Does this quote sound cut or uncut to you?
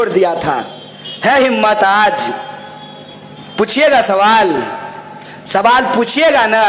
uncut